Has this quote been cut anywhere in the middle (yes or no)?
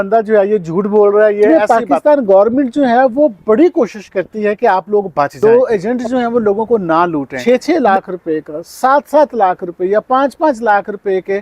yes